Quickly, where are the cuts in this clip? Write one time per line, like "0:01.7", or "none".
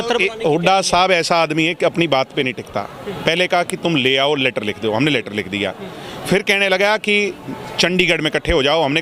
none